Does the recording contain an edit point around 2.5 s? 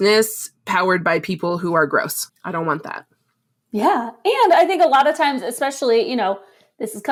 no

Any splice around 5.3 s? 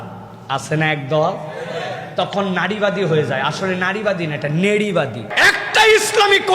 yes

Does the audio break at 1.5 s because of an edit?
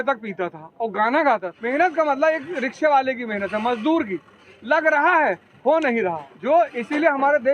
yes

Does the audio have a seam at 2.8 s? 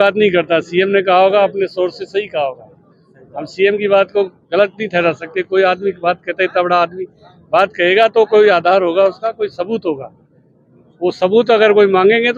no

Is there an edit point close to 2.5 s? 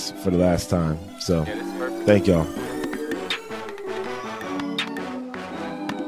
yes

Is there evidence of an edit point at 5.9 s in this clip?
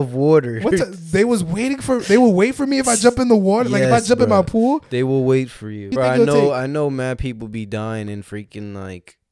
yes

